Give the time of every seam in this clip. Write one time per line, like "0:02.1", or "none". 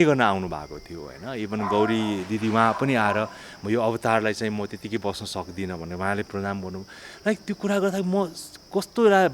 none